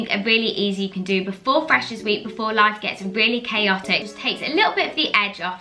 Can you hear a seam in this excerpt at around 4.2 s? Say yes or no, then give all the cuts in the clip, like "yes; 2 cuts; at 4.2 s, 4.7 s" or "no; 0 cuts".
yes; 1 cut; at 4.2 s